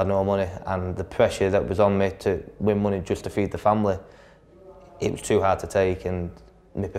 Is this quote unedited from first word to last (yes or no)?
yes